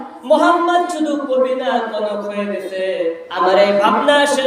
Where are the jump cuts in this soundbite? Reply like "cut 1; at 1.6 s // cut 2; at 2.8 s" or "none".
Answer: cut 1; at 3.2 s